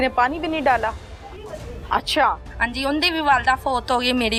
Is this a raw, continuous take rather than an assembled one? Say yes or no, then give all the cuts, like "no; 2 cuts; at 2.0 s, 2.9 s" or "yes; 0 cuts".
yes; 0 cuts